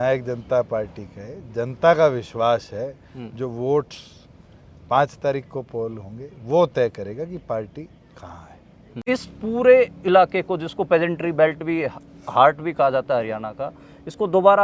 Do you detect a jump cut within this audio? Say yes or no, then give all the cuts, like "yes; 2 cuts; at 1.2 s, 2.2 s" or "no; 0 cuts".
yes; 1 cut; at 9.0 s